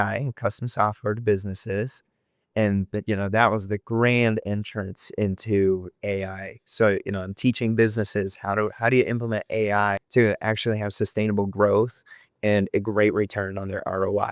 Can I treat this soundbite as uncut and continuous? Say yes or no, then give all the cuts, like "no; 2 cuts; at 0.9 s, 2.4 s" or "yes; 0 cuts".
no; 2 cuts; at 6.0 s, 10.0 s